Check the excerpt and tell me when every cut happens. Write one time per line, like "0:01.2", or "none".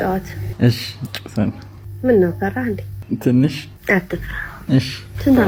none